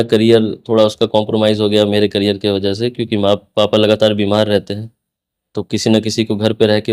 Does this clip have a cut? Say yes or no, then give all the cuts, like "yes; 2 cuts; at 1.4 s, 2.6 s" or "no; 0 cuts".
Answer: no; 0 cuts